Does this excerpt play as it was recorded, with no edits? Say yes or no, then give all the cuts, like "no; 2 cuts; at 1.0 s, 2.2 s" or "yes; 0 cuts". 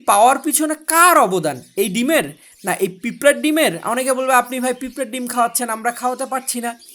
yes; 0 cuts